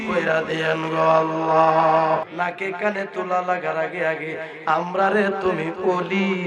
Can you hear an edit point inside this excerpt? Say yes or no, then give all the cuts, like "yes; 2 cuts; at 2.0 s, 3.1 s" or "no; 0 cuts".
yes; 1 cut; at 2.3 s